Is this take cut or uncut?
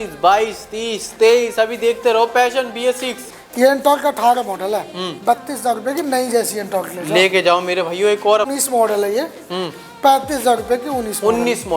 cut